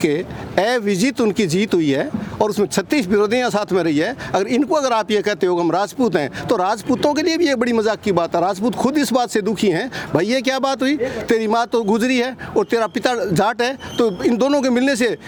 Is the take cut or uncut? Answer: uncut